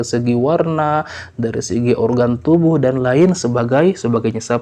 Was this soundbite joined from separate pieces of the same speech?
no; 0 cuts

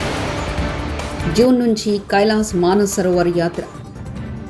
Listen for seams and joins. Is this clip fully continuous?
yes; 0 cuts

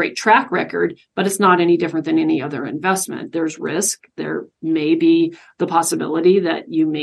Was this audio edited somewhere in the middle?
no; 0 cuts

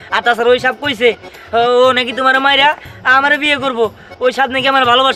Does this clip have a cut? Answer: no; 0 cuts

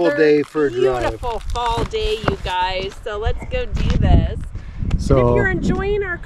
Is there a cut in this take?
no; 0 cuts

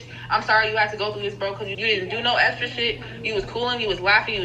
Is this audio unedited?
no; 1 cut; at 1.7 s

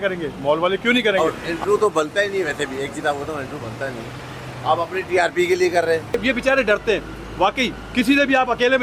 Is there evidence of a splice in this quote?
yes; 2 cuts; at 1.2 s, 6.2 s

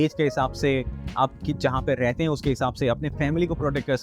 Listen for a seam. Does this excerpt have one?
no; 0 cuts

